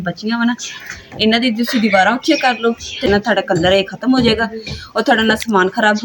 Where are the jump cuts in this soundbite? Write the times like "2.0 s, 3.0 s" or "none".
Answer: 3.1 s